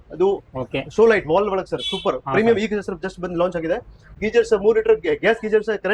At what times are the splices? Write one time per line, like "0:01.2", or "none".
0:04.1